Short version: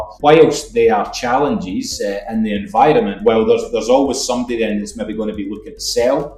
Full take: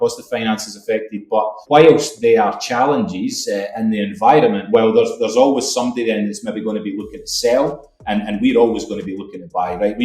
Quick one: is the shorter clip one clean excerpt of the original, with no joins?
yes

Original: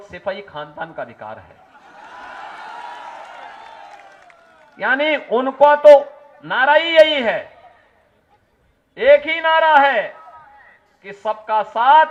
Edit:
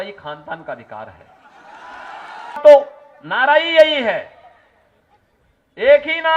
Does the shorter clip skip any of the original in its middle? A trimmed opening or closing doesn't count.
yes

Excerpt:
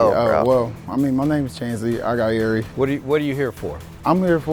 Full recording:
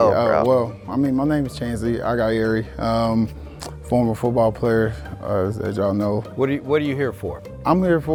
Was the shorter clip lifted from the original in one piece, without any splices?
no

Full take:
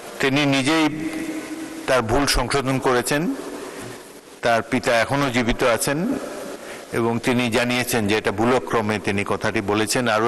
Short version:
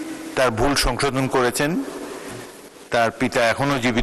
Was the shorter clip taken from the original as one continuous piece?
yes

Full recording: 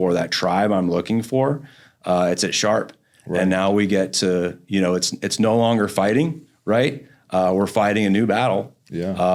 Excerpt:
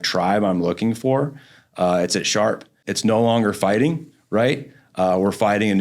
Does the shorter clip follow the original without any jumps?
no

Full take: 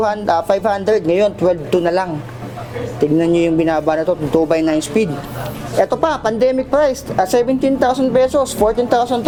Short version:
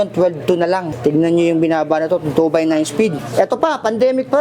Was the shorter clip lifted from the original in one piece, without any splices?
no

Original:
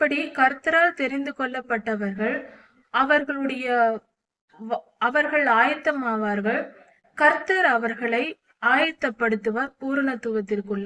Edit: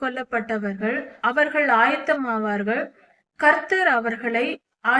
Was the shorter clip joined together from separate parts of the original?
yes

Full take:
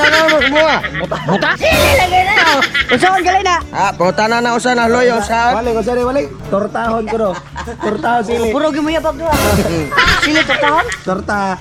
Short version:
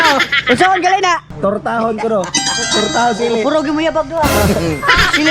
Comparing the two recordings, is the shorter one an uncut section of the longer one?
no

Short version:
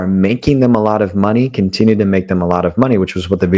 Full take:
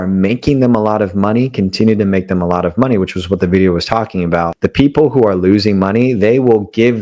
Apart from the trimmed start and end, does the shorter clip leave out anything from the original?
no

